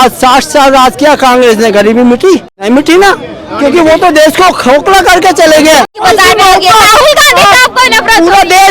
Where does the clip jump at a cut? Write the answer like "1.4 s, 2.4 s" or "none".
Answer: 2.5 s, 6.0 s